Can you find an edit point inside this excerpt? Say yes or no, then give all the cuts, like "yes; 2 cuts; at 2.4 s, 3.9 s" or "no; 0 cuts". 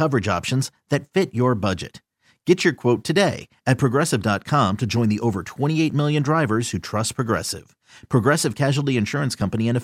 no; 0 cuts